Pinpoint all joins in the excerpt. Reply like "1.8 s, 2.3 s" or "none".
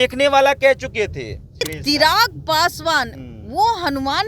1.7 s